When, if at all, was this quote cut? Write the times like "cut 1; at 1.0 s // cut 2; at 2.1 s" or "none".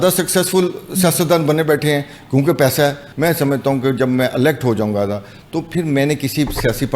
cut 1; at 3.1 s